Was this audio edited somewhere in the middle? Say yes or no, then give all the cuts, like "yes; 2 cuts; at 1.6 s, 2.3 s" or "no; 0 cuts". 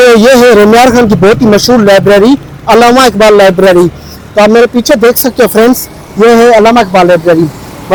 no; 0 cuts